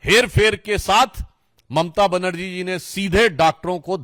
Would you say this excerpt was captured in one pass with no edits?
yes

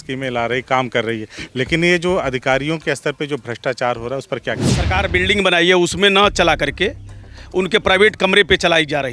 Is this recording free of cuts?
no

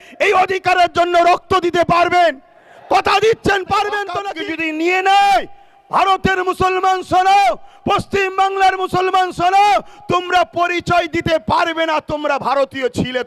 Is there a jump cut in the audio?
yes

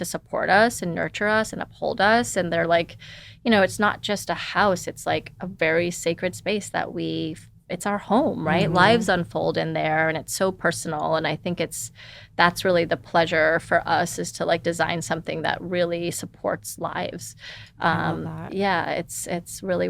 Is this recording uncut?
yes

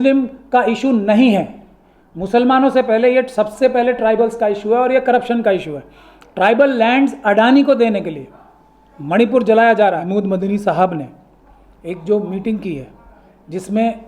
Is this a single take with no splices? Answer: no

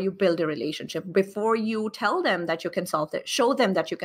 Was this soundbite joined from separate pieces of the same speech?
no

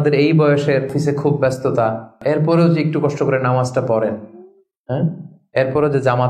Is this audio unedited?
no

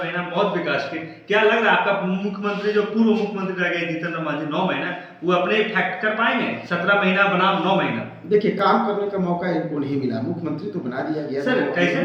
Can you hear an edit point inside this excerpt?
no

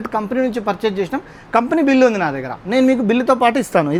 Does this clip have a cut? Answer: no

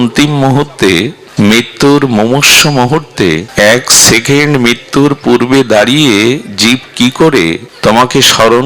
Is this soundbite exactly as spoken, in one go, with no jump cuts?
no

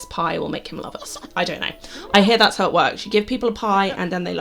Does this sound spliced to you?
no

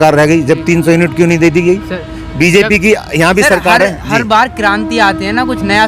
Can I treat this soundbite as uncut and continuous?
yes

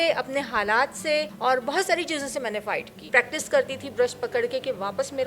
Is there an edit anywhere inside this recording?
yes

